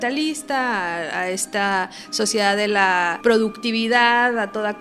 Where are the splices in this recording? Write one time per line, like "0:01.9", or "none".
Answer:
0:03.1